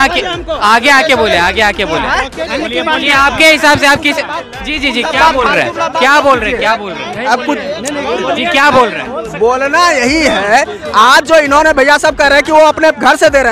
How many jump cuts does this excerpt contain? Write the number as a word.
zero